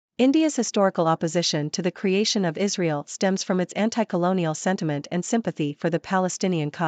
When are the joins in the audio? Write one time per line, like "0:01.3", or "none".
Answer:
none